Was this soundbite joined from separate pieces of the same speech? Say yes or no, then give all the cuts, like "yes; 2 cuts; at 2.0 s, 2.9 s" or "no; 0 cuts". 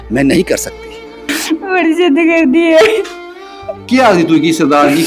yes; 1 cut; at 1.3 s